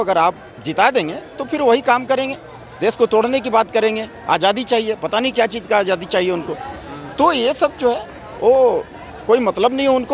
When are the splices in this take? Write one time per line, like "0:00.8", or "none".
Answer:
none